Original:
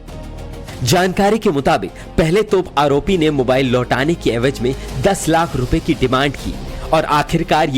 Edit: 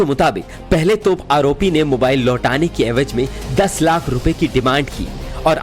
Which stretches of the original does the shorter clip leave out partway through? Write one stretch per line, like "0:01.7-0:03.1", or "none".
none